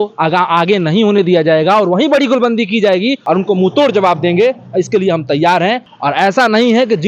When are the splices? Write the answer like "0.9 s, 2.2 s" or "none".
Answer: 3.2 s, 5.9 s